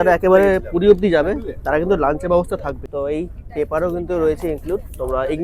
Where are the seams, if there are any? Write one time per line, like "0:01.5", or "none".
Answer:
0:02.8